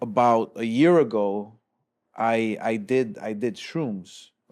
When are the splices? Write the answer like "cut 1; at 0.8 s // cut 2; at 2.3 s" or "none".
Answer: none